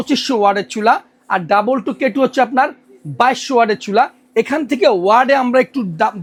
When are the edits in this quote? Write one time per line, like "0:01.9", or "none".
none